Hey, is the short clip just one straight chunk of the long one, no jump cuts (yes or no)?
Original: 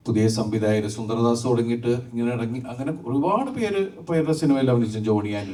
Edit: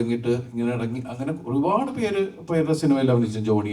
yes